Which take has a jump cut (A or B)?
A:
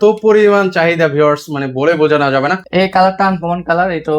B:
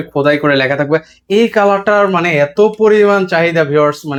A